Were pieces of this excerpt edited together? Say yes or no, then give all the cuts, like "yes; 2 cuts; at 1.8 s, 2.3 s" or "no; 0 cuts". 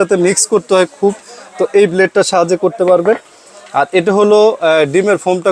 no; 0 cuts